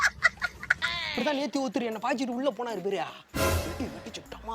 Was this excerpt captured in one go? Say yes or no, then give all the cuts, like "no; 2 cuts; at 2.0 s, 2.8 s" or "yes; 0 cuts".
no; 1 cut; at 0.9 s